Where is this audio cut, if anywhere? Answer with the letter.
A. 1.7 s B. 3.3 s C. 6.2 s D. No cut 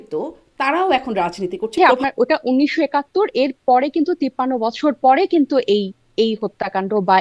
A